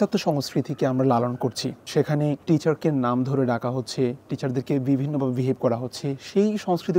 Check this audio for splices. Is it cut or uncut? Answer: cut